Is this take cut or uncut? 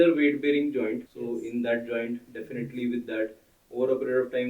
cut